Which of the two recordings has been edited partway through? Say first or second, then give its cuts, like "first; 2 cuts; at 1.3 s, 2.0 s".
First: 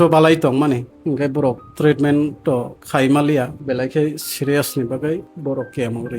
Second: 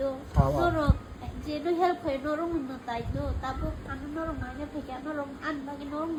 first; 4 cuts; at 0.9 s, 2.8 s, 3.6 s, 5.3 s